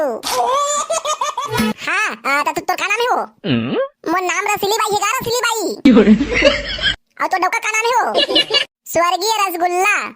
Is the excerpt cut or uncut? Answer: cut